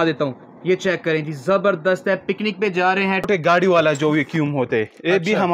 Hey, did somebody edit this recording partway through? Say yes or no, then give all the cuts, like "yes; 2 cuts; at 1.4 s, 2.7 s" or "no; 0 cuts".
yes; 1 cut; at 3.3 s